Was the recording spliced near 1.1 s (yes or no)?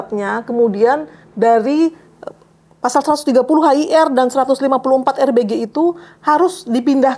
no